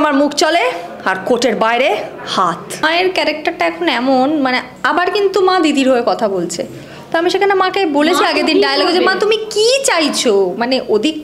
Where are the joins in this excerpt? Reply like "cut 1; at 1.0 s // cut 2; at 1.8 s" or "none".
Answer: cut 1; at 2.8 s